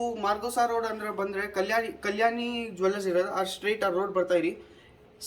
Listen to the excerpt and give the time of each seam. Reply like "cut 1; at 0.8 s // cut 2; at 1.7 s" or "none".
none

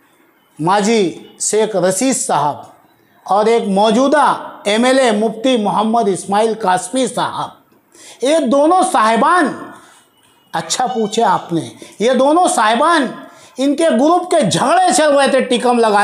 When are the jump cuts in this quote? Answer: none

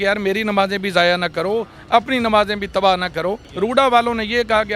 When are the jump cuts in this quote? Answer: cut 1; at 3.4 s

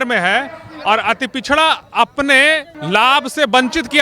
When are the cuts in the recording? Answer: cut 1; at 2.7 s

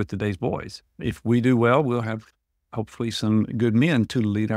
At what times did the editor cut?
cut 1; at 1.0 s

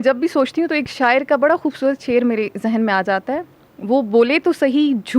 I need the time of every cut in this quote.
none

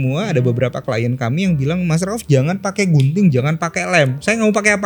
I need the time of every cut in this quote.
none

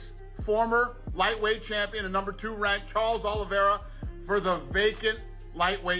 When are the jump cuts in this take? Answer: none

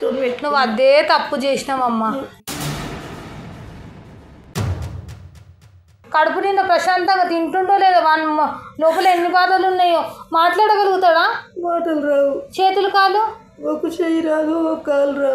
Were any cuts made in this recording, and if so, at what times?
cut 1; at 6.0 s

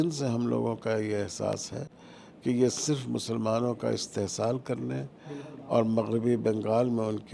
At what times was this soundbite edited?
none

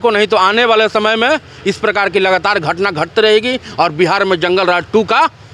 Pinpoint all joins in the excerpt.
none

